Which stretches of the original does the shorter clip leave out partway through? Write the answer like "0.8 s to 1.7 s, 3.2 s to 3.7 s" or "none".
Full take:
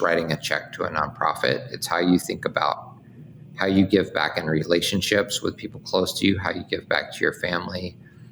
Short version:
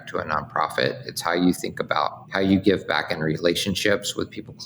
2.9 s to 3.5 s

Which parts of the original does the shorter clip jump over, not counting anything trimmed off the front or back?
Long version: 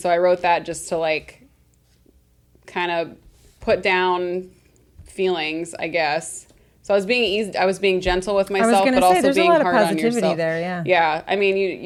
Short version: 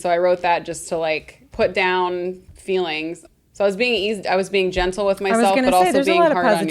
1.4 s to 3.5 s, 4.6 s to 5.0 s, 5.7 s to 6.5 s

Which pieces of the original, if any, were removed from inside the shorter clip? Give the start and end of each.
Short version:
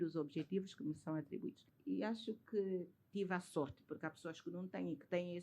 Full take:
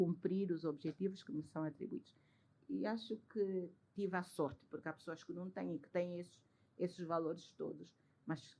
2.2 s to 2.5 s

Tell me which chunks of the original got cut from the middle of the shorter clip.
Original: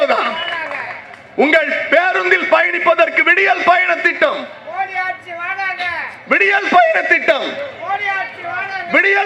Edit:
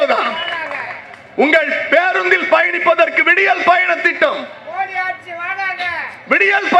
none

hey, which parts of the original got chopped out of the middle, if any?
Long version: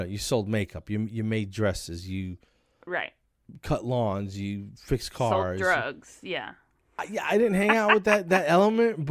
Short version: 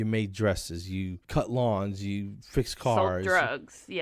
2.4 s to 3.5 s

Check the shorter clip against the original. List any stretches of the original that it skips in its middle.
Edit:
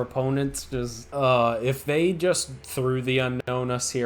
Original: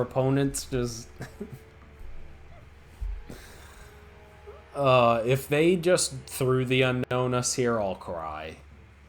1.0 s to 4.6 s

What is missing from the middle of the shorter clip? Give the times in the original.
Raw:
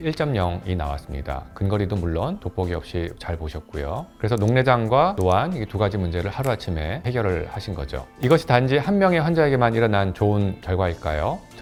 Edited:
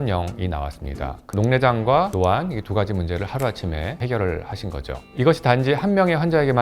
1.6 s to 4.4 s

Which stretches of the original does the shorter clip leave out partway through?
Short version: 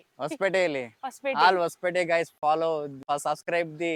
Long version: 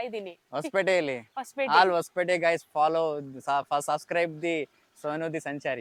3.4 s to 3.7 s

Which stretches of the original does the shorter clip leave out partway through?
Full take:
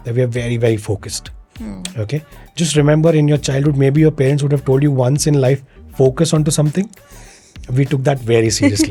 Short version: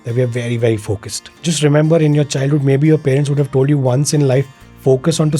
1.2 s to 2.4 s

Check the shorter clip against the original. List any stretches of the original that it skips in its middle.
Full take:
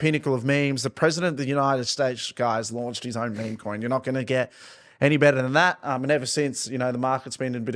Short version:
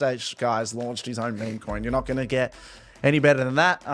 none

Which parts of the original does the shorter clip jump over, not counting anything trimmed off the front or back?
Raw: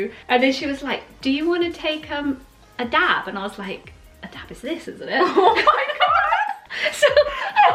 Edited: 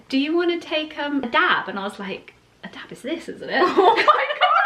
2.4 s to 2.8 s

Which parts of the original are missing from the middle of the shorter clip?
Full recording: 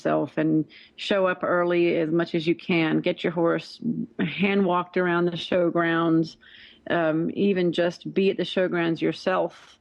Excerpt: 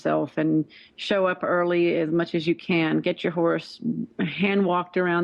none

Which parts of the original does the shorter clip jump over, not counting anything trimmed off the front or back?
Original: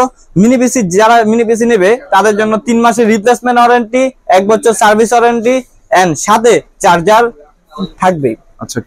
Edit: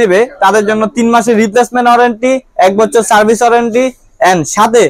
none

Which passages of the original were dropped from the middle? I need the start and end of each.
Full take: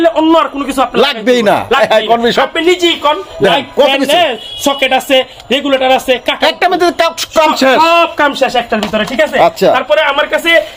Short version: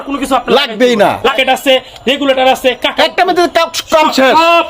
1.8 s to 4.8 s

